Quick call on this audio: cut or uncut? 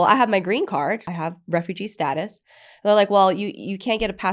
cut